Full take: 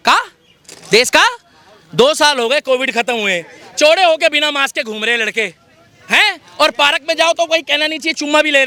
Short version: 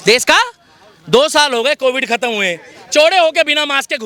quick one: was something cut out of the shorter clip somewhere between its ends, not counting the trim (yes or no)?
no